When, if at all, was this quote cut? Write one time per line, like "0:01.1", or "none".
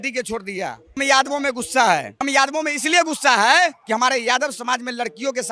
0:01.0
0:02.2
0:03.8